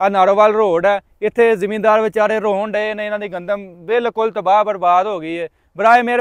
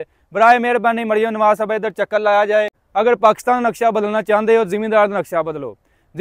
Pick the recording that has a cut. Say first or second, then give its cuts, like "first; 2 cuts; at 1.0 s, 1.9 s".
second; 1 cut; at 2.8 s